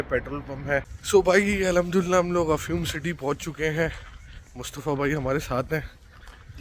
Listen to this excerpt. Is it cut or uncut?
cut